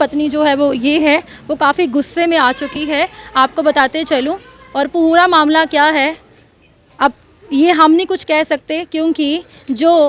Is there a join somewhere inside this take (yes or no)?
no